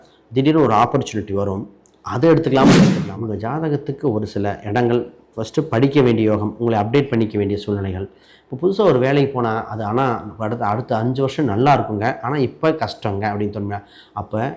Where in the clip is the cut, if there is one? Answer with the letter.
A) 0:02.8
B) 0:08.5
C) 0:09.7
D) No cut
A